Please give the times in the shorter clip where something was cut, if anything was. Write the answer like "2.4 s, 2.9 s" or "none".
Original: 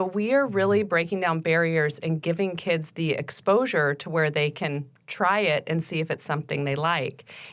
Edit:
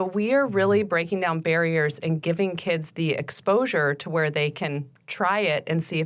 none